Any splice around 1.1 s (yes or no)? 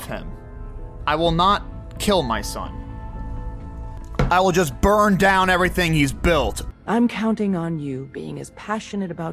no